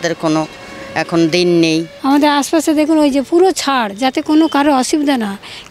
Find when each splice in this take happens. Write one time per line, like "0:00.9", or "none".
0:01.9